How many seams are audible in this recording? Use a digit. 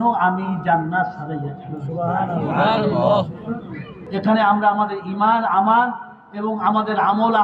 1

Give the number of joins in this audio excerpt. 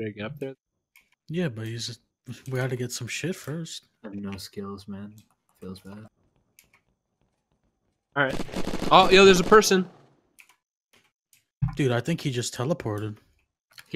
0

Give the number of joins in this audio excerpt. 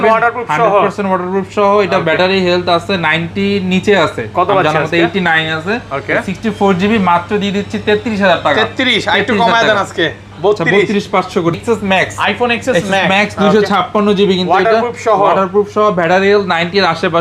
1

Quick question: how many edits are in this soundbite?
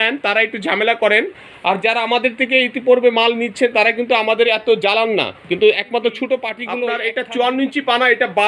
1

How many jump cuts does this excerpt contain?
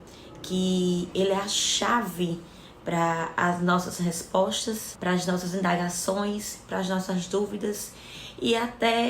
1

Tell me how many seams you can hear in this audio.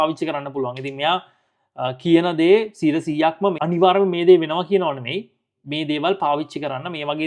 1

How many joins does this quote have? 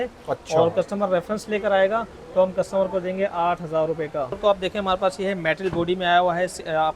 1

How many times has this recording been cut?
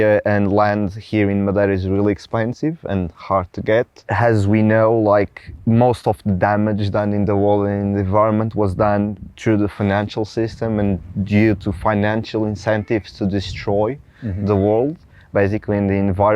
1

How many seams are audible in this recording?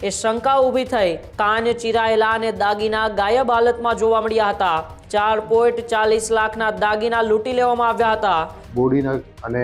3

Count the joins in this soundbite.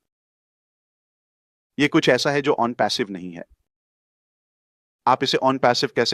0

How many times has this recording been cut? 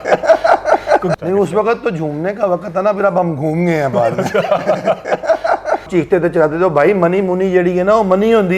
2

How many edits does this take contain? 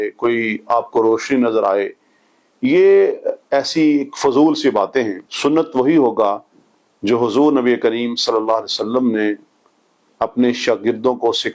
1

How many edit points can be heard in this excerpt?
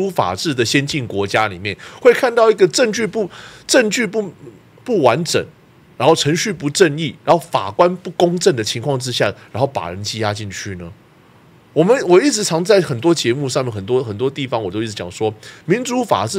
0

